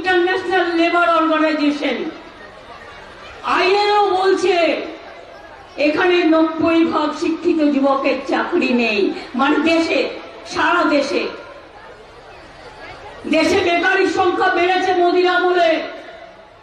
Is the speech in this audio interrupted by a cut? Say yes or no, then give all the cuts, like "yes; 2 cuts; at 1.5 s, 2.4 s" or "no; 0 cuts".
no; 0 cuts